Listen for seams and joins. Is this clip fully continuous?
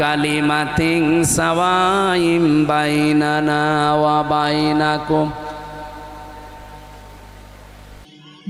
yes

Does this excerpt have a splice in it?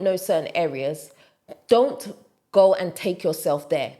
no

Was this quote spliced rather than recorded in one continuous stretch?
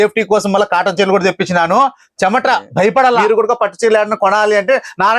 yes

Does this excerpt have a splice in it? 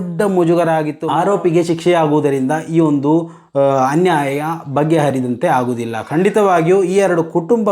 yes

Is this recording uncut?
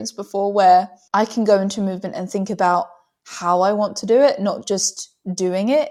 yes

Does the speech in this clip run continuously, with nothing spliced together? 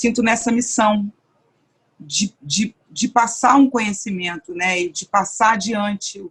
yes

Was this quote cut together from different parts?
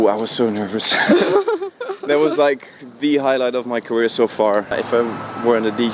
yes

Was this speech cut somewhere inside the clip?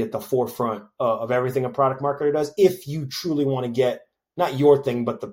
no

